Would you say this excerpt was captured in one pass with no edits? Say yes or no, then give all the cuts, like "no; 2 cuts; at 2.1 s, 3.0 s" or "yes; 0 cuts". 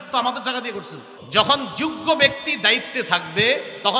no; 1 cut; at 1.1 s